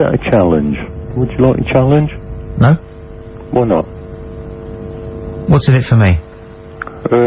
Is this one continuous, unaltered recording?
no; 1 cut; at 6.3 s

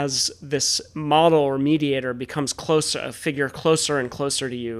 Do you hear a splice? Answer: no; 0 cuts

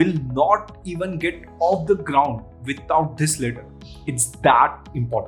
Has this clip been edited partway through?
no; 0 cuts

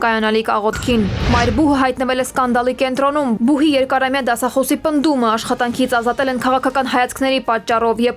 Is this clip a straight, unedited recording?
no; 1 cut; at 1.2 s

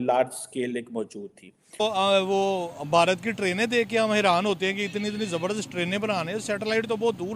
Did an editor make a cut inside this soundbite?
yes; 1 cut; at 1.8 s

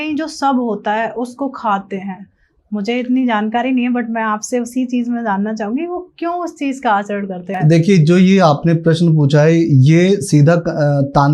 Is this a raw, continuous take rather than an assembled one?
no; 1 cut; at 7.5 s

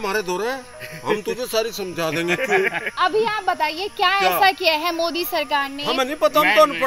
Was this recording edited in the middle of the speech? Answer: no; 0 cuts

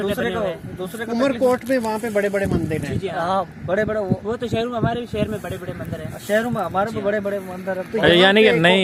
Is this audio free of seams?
yes; 0 cuts

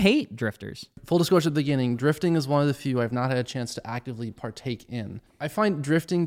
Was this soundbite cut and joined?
yes; 2 cuts; at 1.0 s, 5.2 s

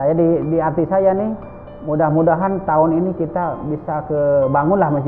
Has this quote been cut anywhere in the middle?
no; 0 cuts

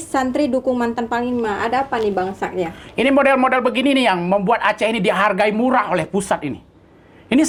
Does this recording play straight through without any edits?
yes; 0 cuts

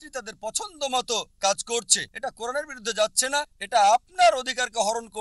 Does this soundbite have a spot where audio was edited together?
yes; 1 cut; at 2.0 s

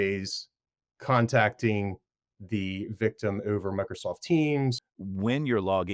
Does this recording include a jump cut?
yes; 1 cut; at 4.8 s

